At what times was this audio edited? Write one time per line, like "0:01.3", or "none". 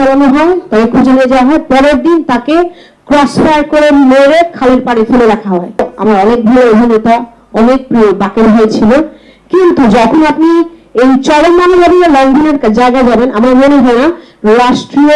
0:05.9